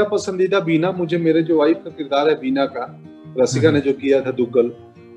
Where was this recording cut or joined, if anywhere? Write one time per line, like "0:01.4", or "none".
none